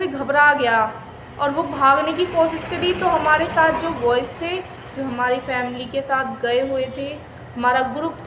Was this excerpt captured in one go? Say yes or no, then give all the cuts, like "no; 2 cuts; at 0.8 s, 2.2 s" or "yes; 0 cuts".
yes; 0 cuts